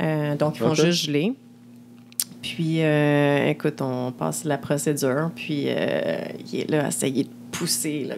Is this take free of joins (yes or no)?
yes